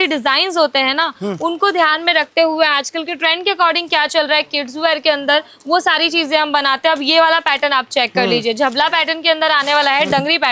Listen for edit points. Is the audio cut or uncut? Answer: uncut